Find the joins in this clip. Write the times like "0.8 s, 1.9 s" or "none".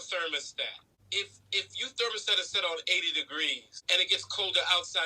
0.9 s, 3.7 s